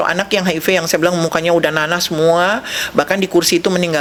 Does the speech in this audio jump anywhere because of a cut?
no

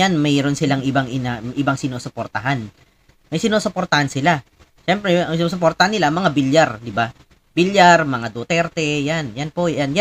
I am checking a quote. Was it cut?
no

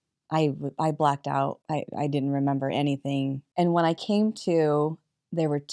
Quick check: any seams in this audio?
yes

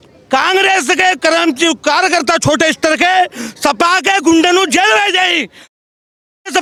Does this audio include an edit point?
no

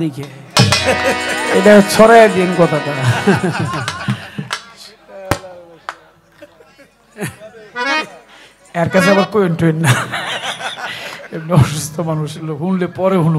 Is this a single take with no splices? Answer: yes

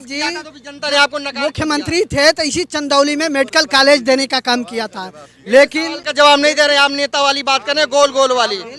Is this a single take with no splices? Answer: yes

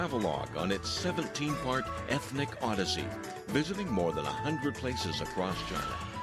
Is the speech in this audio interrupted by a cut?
no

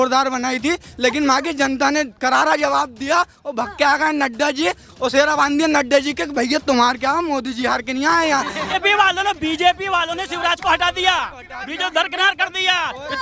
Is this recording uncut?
no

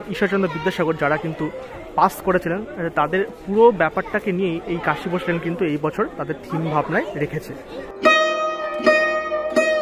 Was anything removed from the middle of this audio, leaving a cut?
no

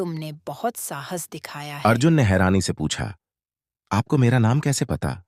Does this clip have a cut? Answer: yes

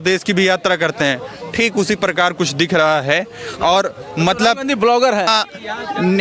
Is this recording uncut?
no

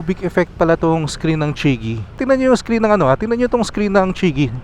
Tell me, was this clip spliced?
yes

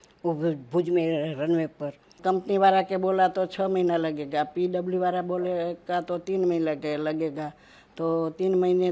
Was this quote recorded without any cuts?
no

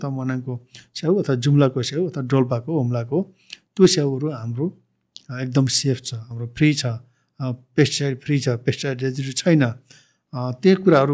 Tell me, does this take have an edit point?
no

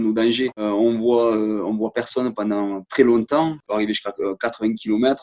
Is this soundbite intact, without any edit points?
no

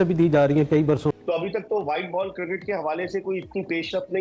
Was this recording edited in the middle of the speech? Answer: yes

